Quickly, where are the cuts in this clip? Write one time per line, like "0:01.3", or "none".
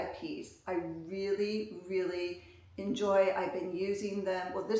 none